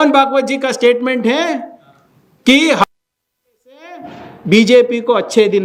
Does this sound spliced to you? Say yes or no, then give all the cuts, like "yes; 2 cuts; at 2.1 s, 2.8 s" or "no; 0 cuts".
no; 0 cuts